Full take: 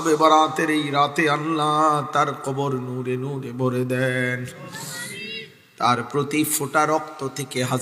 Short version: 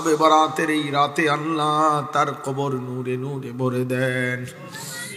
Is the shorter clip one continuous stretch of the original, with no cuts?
yes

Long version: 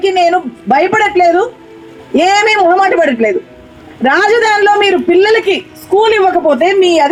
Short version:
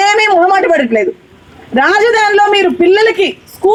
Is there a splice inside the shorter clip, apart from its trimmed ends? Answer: no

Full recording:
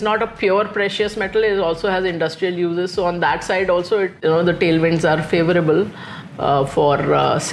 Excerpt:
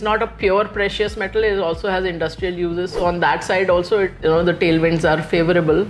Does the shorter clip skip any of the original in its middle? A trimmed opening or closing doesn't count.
no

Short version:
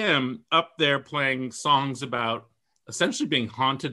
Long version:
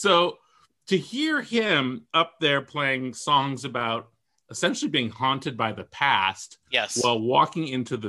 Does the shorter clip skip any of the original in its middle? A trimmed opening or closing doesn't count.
no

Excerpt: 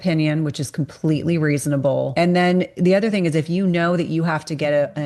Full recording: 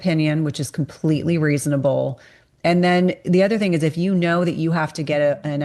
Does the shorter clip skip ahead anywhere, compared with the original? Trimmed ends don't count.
yes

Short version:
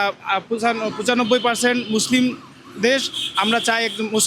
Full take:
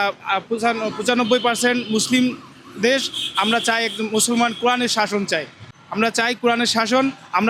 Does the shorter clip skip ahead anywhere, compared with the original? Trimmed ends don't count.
no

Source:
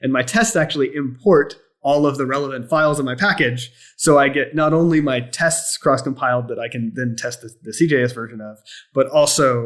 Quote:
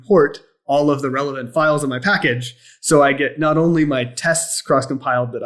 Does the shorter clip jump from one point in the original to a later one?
no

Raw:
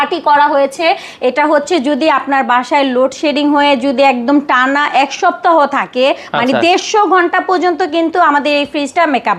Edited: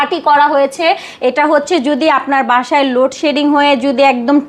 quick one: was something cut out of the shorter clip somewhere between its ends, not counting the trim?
no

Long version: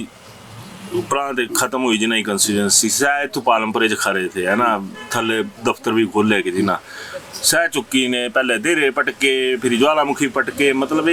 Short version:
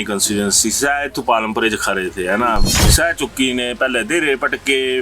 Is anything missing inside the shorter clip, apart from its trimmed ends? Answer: yes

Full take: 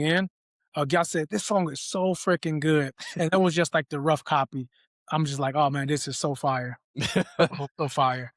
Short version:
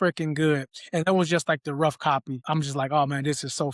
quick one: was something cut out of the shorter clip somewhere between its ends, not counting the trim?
yes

